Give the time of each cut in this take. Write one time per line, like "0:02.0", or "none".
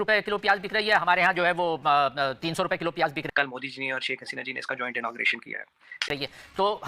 0:03.3
0:06.1